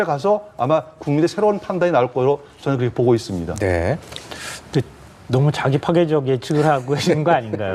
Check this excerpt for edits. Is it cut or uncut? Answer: uncut